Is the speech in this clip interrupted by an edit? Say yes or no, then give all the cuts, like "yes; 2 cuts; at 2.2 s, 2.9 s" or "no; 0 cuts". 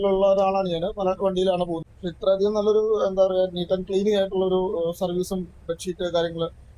yes; 1 cut; at 1.8 s